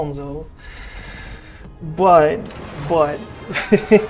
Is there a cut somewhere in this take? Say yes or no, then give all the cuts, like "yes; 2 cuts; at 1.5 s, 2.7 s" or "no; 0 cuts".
no; 0 cuts